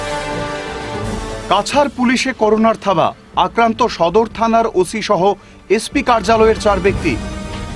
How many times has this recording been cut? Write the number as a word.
zero